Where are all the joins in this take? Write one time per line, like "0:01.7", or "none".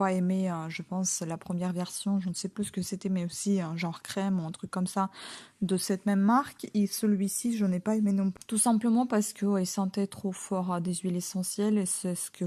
0:08.4